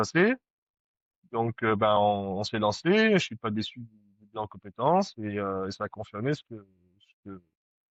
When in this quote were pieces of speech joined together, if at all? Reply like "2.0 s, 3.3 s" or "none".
none